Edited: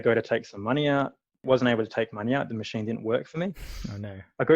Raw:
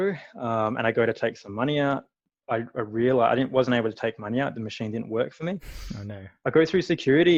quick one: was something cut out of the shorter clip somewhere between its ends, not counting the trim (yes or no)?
yes